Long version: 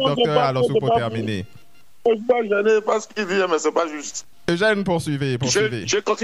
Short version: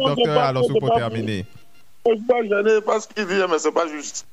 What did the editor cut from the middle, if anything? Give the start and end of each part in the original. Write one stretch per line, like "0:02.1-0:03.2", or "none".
none